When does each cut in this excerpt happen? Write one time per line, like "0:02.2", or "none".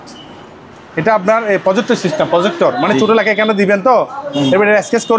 none